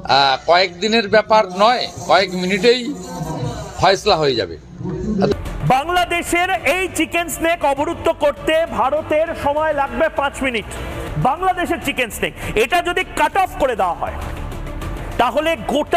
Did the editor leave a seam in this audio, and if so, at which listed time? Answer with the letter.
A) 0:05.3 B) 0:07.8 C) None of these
A